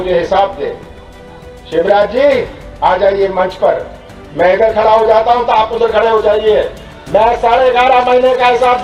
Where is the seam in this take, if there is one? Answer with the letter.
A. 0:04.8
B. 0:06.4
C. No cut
C